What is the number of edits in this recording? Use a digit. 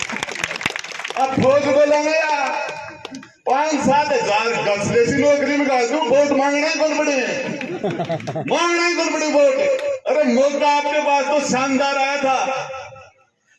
1